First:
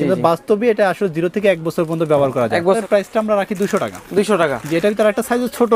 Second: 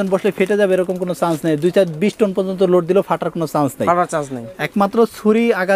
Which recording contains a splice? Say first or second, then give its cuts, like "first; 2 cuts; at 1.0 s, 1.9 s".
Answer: first; 1 cut; at 2.8 s